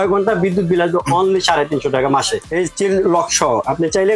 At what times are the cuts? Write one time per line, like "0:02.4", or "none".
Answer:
0:02.4